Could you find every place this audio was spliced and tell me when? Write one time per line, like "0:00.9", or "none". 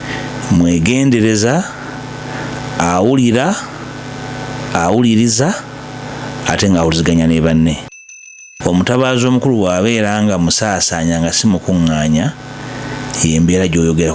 0:08.1